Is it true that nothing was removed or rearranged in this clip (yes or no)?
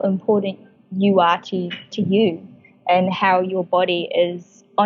yes